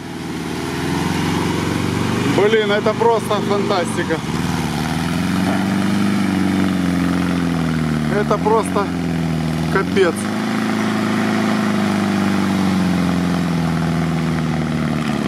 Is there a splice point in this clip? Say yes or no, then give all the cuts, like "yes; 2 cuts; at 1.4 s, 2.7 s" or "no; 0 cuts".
no; 0 cuts